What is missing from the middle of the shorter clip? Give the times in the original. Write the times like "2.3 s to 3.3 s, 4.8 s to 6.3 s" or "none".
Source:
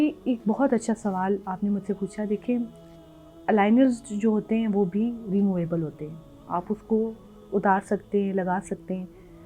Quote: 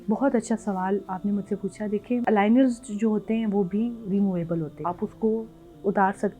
2.6 s to 3.4 s, 6.0 s to 6.4 s